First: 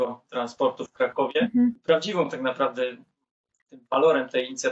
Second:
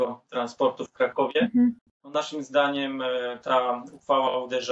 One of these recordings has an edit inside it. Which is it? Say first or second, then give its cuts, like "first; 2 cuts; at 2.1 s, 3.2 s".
first; 1 cut; at 1.8 s